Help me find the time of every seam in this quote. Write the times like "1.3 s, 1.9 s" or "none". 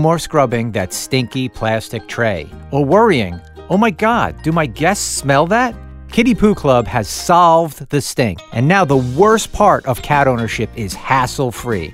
none